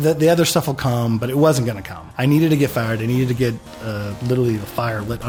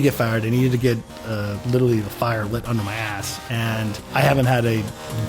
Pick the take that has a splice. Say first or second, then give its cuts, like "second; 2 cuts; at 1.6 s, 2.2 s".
second; 1 cut; at 4.1 s